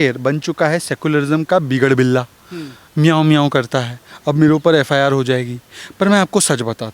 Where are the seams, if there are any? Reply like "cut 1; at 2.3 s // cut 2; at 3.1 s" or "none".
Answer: none